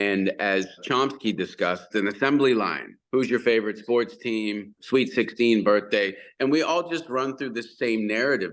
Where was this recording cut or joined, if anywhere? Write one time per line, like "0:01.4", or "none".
0:00.8
0:01.9
0:02.9
0:04.7